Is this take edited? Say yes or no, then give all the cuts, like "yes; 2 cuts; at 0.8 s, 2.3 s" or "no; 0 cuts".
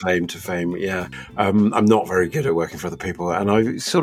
yes; 1 cut; at 1.2 s